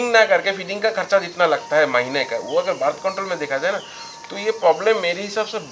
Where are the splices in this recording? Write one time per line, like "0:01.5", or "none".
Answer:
none